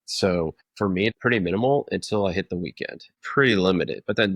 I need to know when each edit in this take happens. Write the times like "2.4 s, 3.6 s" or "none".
0.8 s, 3.1 s